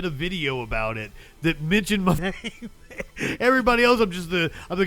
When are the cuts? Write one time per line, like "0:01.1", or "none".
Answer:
0:02.2